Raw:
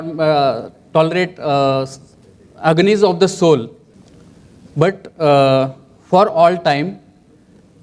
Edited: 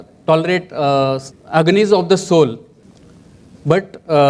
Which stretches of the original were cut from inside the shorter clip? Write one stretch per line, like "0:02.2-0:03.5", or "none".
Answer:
0:02.0-0:02.4